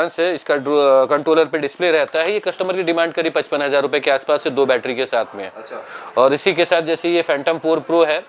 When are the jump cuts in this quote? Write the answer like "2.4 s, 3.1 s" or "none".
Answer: none